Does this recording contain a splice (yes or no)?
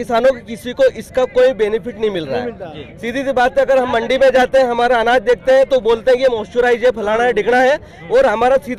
no